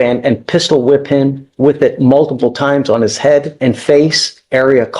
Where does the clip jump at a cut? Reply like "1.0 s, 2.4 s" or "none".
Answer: 3.5 s

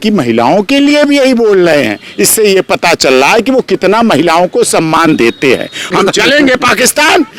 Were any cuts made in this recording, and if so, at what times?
5.9 s

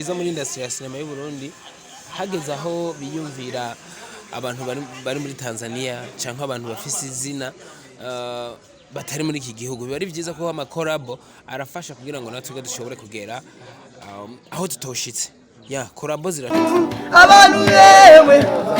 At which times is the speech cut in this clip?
16.5 s

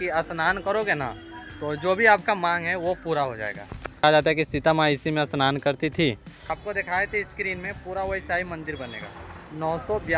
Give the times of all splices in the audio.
4.0 s, 6.5 s

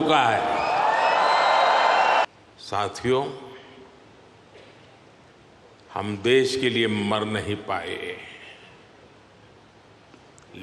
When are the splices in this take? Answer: 2.2 s

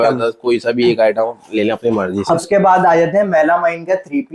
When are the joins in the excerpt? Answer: 2.4 s

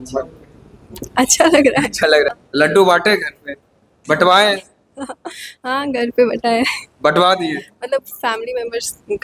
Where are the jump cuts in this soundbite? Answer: 2.3 s

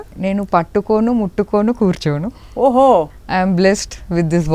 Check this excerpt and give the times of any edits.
none

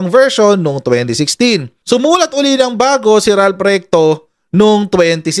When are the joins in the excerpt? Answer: 1.7 s

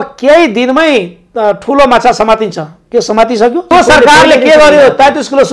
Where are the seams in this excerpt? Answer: 3.7 s

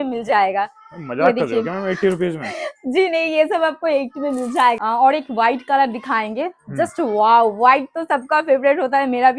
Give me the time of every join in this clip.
4.8 s

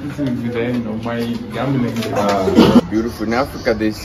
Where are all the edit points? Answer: 2.8 s

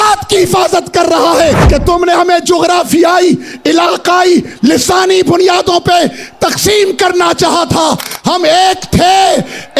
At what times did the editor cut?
1.6 s

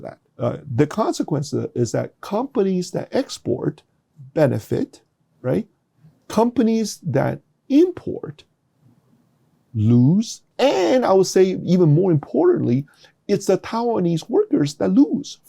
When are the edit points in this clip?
10.4 s

